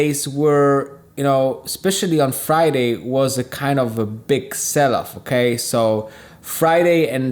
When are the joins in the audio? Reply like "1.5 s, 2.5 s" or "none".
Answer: none